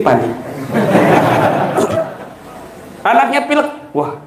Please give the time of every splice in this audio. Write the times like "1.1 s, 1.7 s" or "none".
2.2 s